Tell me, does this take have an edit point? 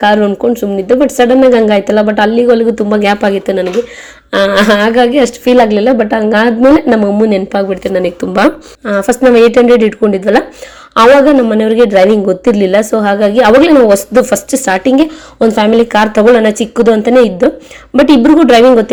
no; 0 cuts

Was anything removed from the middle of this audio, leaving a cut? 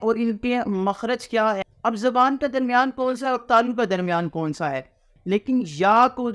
yes; 2 cuts; at 1.7 s, 5.1 s

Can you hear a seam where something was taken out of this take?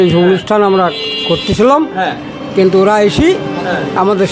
no; 0 cuts

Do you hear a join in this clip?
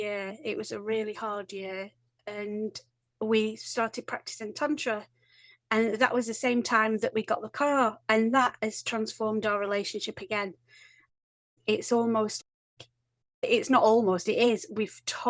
no; 0 cuts

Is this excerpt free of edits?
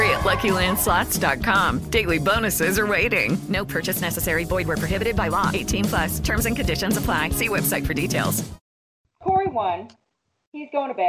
no; 1 cut; at 9.0 s

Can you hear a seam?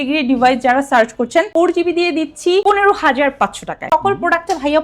yes; 1 cut; at 3.8 s

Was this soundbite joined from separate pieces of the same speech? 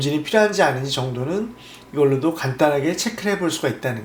no; 0 cuts

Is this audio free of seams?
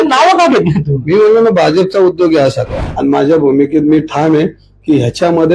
no; 1 cut; at 2.8 s

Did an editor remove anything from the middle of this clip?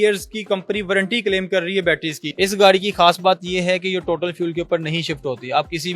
yes; 1 cut; at 2.2 s

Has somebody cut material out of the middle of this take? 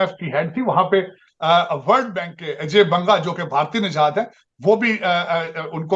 no; 0 cuts

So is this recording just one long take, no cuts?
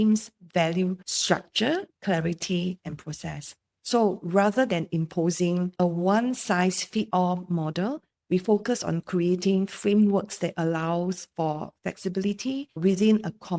yes; 0 cuts

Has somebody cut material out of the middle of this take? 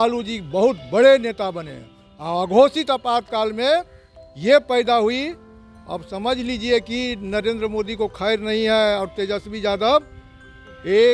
no; 0 cuts

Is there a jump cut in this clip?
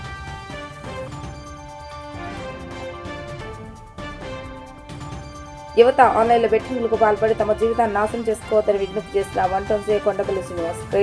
no; 0 cuts

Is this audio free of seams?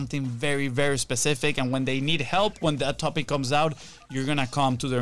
yes; 0 cuts

